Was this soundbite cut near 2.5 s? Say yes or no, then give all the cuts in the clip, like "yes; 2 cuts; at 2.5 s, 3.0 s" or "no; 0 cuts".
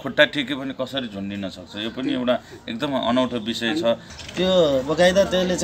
no; 1 cut; at 4.1 s